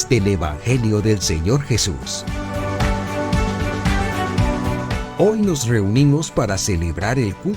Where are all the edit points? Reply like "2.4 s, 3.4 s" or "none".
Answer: 2.1 s, 5.1 s

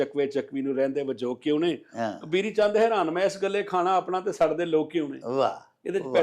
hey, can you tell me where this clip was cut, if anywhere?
none

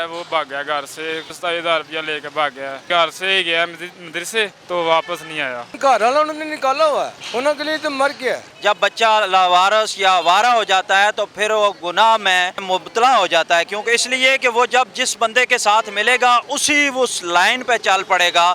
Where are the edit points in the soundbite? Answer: 1.3 s, 2.8 s, 4.6 s, 5.7 s, 7.2 s, 8.5 s, 12.6 s

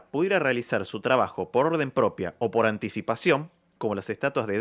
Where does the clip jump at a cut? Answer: none

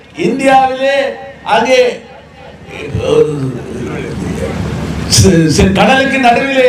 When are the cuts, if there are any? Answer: none

